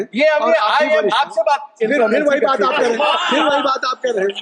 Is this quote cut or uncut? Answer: uncut